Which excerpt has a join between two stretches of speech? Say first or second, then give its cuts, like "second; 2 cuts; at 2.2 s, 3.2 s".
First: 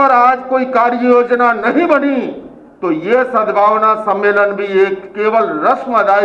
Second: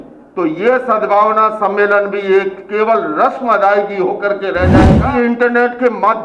second; 1 cut; at 5.0 s